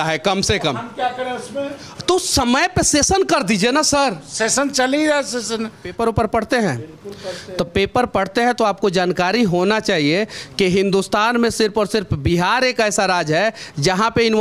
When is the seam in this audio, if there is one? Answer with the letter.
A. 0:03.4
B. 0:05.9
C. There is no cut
B